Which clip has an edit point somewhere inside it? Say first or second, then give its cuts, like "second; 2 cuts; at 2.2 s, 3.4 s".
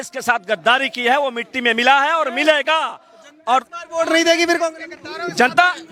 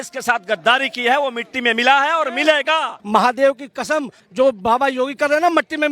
second; 2 cuts; at 3.0 s, 4.2 s